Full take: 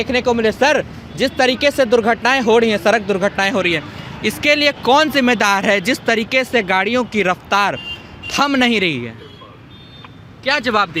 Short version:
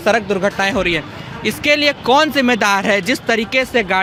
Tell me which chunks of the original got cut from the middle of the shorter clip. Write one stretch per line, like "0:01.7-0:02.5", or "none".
none